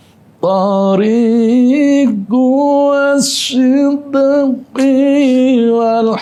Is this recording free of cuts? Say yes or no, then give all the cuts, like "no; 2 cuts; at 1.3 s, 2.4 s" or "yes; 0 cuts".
yes; 0 cuts